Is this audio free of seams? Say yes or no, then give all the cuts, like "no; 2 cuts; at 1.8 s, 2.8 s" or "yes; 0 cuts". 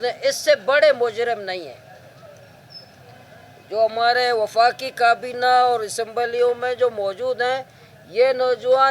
yes; 0 cuts